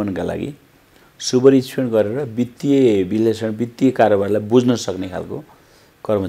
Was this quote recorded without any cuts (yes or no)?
yes